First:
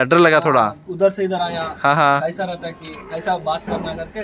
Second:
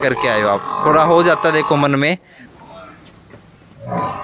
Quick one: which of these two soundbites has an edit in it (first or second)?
second